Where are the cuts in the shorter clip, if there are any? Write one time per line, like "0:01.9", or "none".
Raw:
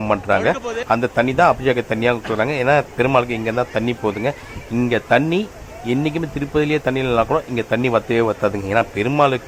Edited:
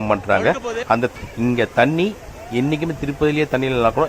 0:01.1